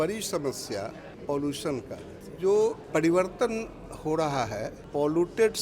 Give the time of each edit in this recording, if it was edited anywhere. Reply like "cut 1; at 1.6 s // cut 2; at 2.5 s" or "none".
cut 1; at 1.1 s // cut 2; at 2.2 s // cut 3; at 2.8 s // cut 4; at 4.8 s

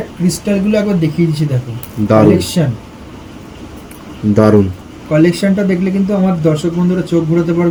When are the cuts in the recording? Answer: none

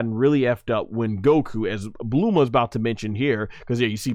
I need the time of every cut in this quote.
none

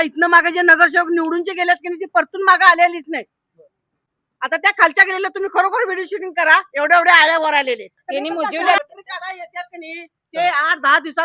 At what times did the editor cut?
cut 1; at 8.8 s

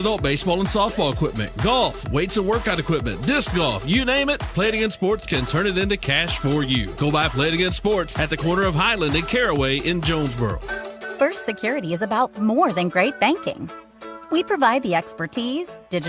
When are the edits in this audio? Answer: cut 1; at 8.1 s // cut 2; at 10.3 s

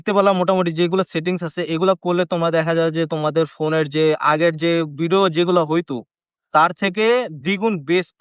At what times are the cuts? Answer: none

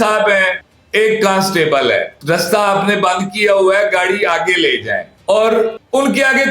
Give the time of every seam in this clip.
cut 1; at 2.1 s

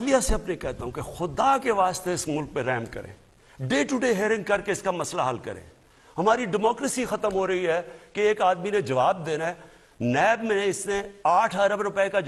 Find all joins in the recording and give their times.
none

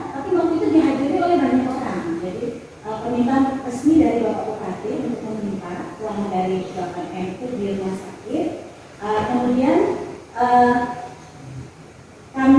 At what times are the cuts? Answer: none

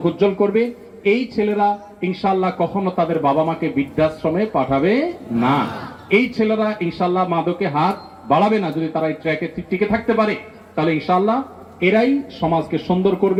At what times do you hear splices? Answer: none

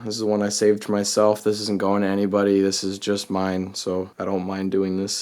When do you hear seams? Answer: cut 1; at 4.1 s

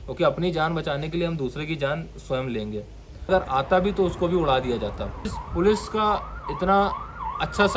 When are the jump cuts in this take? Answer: cut 1; at 3.3 s // cut 2; at 5.4 s

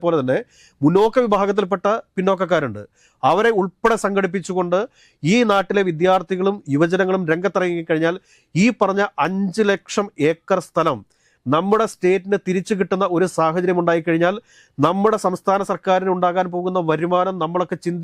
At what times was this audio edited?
none

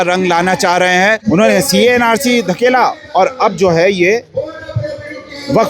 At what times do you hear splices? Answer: cut 1; at 1.2 s

